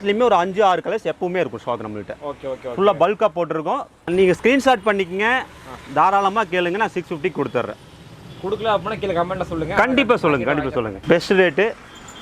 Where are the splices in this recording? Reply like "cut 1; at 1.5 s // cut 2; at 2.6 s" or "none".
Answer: cut 1; at 4.1 s // cut 2; at 11.0 s

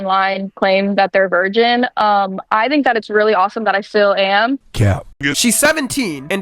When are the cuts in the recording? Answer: cut 1; at 4.7 s

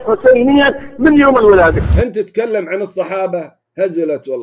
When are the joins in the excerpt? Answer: cut 1; at 1.9 s

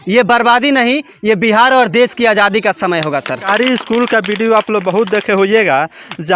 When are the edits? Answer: cut 1; at 3.4 s

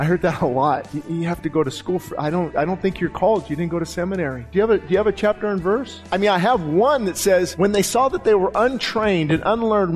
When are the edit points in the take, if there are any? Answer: cut 1; at 0.9 s // cut 2; at 2.5 s // cut 3; at 4.4 s // cut 4; at 6.0 s // cut 5; at 7.5 s

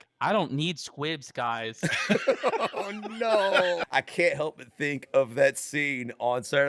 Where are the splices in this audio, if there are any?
cut 1; at 3.8 s

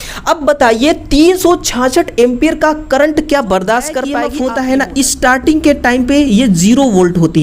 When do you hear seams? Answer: cut 1; at 4.2 s

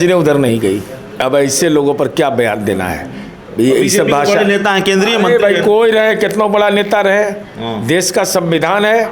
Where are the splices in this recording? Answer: cut 1; at 1.2 s

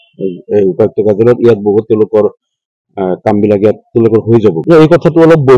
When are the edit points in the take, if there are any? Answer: cut 1; at 4.6 s

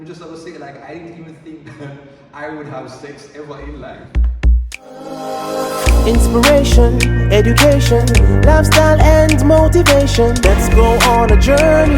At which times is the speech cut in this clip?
cut 1; at 4.0 s

